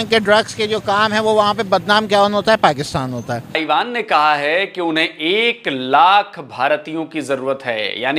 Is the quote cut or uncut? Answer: cut